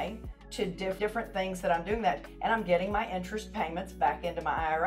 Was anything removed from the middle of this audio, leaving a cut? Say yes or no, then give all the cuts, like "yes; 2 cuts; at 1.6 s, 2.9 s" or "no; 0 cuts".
yes; 1 cut; at 1.0 s